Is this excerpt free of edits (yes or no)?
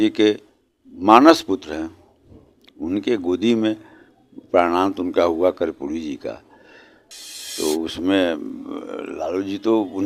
yes